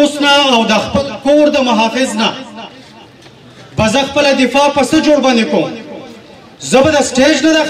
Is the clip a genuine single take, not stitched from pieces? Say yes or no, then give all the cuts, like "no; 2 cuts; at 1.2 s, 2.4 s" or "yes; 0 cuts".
yes; 0 cuts